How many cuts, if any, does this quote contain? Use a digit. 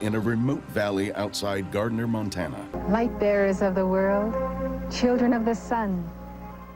1